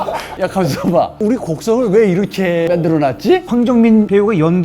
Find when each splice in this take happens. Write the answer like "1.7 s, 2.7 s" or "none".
3.4 s